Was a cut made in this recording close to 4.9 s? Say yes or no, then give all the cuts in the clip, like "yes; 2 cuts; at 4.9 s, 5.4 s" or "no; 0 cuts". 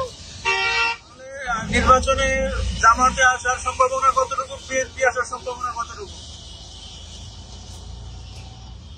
no; 1 cut; at 1.6 s